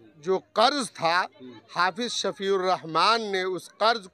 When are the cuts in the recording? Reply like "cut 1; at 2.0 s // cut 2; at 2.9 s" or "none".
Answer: none